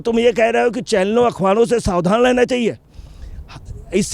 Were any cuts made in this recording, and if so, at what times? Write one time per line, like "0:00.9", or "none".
none